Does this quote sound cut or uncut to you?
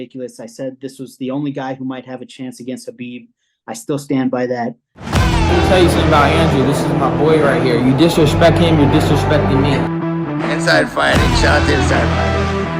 cut